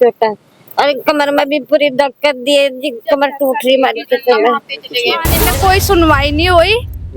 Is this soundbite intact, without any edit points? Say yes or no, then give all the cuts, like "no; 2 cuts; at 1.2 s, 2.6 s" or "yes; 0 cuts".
no; 1 cut; at 5.3 s